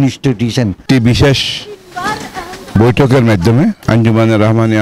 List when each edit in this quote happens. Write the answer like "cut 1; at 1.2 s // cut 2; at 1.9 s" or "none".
cut 1; at 0.8 s // cut 2; at 3.8 s